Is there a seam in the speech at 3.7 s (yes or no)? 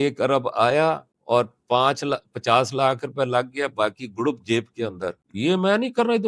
no